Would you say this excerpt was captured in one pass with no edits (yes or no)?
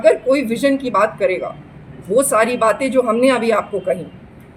yes